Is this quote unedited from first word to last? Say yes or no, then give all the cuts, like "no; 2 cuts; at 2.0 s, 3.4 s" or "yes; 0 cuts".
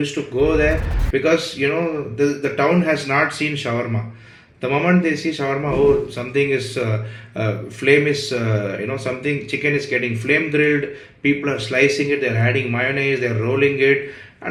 yes; 0 cuts